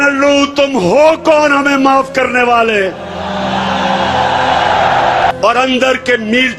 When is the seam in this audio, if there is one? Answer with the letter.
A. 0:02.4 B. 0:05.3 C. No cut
B